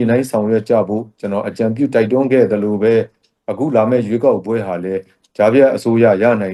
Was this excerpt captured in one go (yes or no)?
yes